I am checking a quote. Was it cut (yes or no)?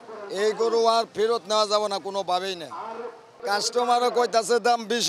yes